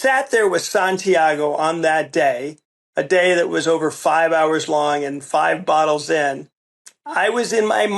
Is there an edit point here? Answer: no; 0 cuts

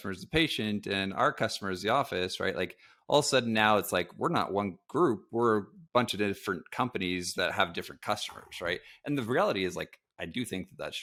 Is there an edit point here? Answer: no; 0 cuts

